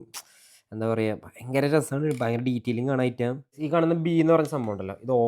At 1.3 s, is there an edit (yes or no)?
no